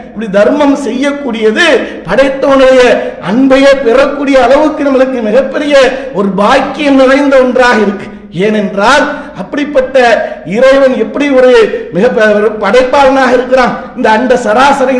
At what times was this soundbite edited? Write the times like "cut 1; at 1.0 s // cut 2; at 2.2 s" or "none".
none

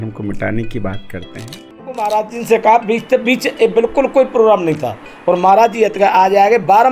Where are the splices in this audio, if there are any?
cut 1; at 2.0 s

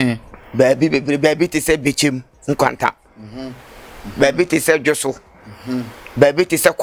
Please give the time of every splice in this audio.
none

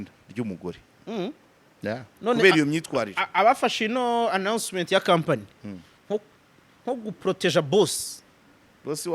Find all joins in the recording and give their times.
cut 1; at 2.1 s

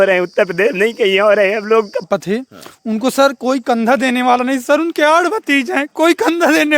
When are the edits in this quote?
cut 1; at 2.0 s

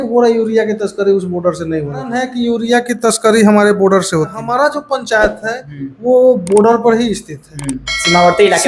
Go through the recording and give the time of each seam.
cut 1; at 2.2 s // cut 2; at 4.4 s

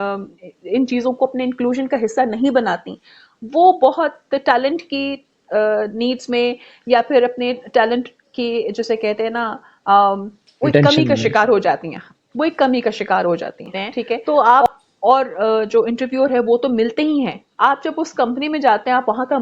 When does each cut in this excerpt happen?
cut 1; at 14.2 s

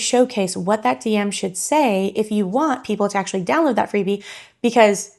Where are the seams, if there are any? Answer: none

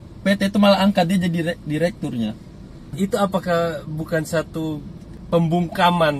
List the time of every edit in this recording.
cut 1; at 2.9 s // cut 2; at 5.1 s

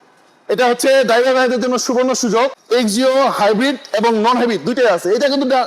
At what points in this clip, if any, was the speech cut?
cut 1; at 2.6 s

